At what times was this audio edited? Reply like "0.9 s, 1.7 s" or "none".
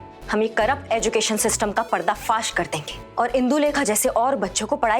3.0 s